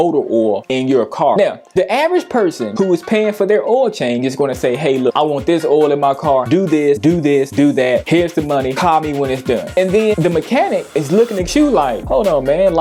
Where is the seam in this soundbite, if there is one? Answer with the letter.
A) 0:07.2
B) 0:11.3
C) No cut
C